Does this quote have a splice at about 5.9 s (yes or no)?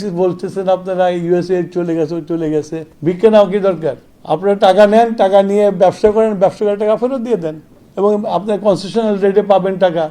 no